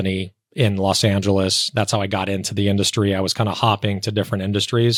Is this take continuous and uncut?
yes; 0 cuts

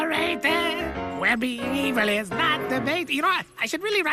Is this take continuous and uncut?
yes; 0 cuts

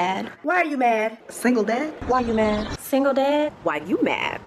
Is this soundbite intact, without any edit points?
yes; 0 cuts

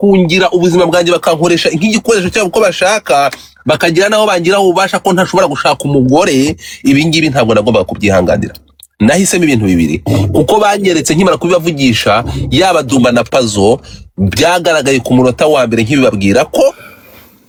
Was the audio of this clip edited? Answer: no; 0 cuts

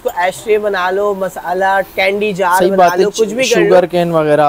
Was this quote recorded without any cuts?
yes; 0 cuts

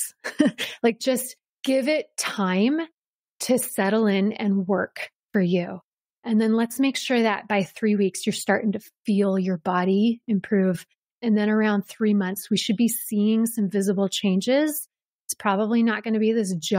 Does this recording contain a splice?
yes; 1 cut; at 1.6 s

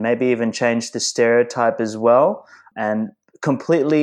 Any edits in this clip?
yes; 1 cut; at 2.7 s

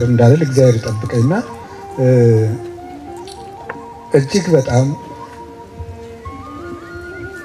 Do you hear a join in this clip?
no; 0 cuts

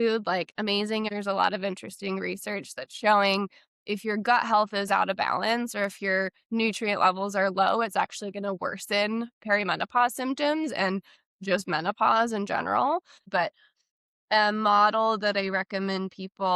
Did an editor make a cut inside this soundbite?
yes; 2 cuts; at 1.1 s, 13.3 s

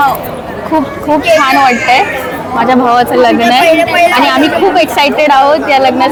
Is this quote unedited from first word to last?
yes; 0 cuts

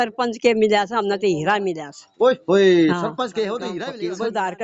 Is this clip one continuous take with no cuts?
no; 1 cut; at 3.6 s

